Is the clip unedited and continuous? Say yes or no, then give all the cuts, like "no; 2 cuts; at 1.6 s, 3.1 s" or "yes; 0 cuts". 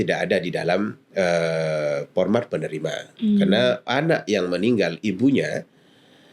yes; 0 cuts